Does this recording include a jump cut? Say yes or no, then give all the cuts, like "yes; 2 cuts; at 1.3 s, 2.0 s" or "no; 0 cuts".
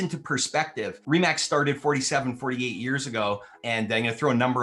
yes; 2 cuts; at 1.0 s, 3.5 s